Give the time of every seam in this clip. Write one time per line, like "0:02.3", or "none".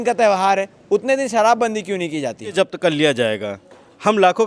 0:02.5